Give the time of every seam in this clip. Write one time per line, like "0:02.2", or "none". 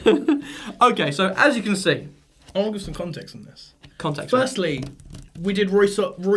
0:01.8